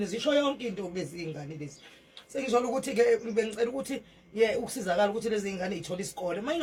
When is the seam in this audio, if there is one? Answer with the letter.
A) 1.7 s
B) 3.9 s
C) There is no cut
C